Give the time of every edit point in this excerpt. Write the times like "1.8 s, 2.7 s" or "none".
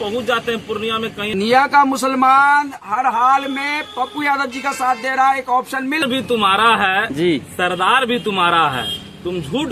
1.3 s, 6.0 s